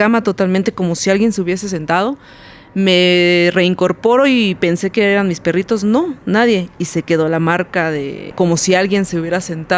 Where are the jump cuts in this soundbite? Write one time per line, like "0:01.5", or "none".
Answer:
0:08.3